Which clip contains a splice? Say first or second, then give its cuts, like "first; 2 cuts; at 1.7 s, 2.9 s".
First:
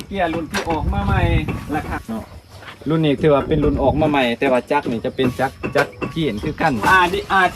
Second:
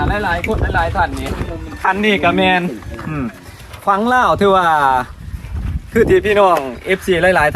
first; 2 cuts; at 1.9 s, 6.9 s